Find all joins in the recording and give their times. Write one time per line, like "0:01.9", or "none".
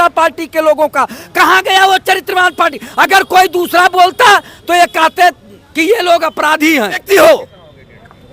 0:07.0